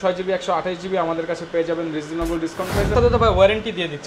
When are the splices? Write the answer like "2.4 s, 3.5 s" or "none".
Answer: 2.9 s